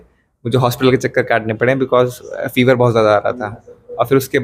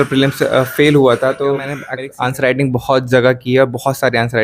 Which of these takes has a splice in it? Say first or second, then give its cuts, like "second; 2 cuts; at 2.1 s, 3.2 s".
second; 1 cut; at 1.8 s